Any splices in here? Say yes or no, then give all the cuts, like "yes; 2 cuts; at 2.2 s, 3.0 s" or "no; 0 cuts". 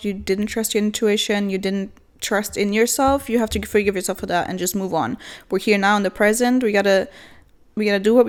no; 0 cuts